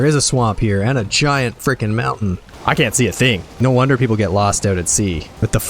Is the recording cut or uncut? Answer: cut